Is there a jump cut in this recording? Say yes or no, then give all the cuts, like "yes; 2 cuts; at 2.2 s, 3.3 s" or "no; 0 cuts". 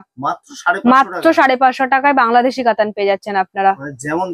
no; 0 cuts